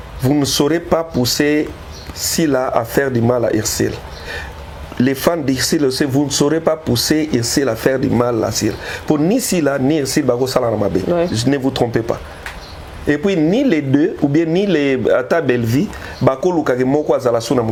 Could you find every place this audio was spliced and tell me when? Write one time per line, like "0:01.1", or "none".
none